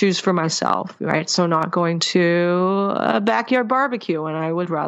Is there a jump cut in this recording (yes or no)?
no